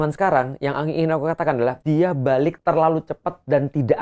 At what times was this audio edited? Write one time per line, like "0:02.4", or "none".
0:01.8
0:02.6